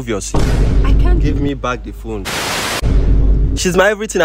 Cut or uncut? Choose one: cut